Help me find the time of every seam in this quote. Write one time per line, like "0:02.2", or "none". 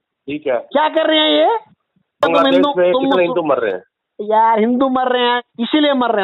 0:02.2